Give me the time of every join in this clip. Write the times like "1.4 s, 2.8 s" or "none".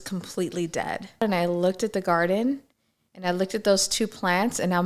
1.2 s